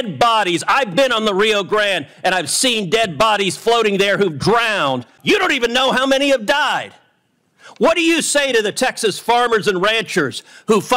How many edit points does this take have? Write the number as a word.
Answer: one